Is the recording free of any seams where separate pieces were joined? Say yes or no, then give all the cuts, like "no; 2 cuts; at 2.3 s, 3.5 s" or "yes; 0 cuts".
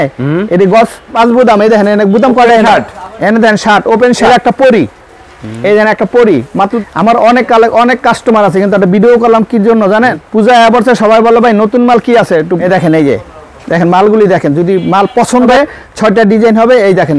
no; 6 cuts; at 1.1 s, 4.3 s, 6.8 s, 10.2 s, 12.6 s, 15.5 s